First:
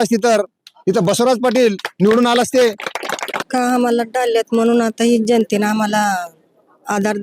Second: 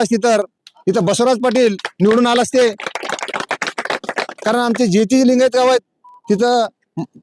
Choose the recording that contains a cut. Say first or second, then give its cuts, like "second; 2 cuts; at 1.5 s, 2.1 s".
first; 1 cut; at 3.3 s